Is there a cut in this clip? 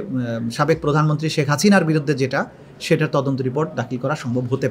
no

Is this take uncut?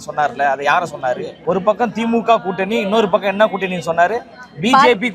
no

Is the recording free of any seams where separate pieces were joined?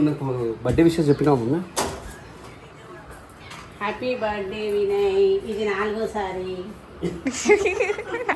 yes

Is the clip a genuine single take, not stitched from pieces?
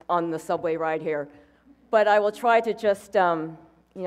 no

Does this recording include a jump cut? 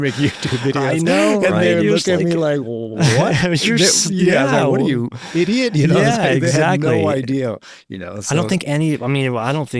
no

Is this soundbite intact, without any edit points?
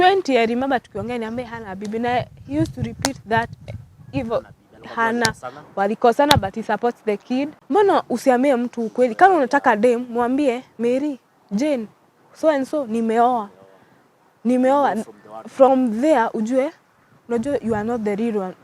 no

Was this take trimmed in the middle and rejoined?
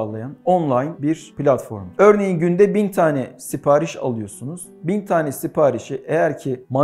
no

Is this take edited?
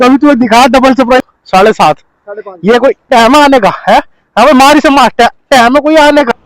yes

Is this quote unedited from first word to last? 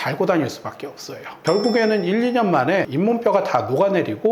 no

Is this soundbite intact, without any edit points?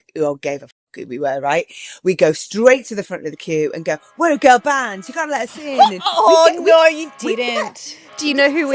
yes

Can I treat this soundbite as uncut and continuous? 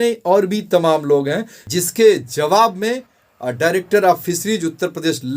no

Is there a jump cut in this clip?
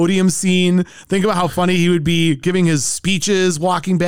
no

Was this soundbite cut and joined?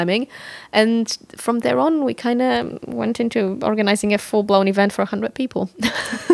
no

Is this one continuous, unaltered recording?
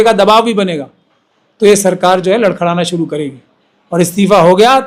yes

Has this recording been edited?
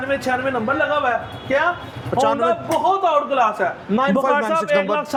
no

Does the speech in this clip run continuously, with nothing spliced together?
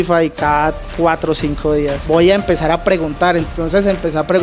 no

